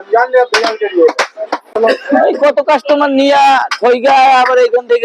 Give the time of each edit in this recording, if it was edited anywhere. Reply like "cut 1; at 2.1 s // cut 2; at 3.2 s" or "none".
cut 1; at 1.7 s